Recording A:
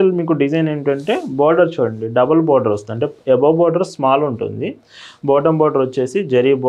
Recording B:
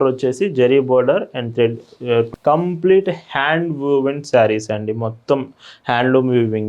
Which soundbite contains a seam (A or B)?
B